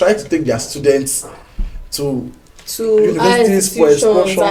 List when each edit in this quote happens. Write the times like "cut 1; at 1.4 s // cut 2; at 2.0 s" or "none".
none